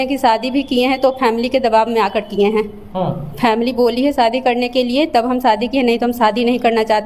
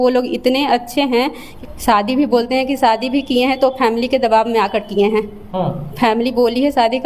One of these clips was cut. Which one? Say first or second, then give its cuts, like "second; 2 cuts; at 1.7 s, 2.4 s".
second; 1 cut; at 1.4 s